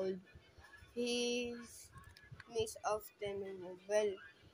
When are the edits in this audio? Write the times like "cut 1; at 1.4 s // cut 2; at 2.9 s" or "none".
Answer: none